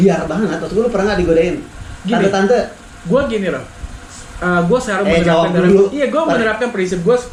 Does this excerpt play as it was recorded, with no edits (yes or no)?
yes